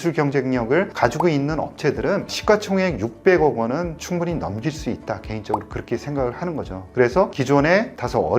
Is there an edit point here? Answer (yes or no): yes